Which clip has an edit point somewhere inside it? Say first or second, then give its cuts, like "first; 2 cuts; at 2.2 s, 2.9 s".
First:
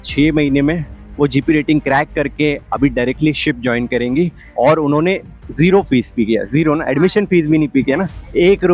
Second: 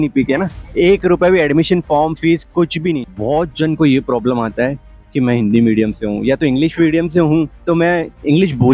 second; 1 cut; at 3.1 s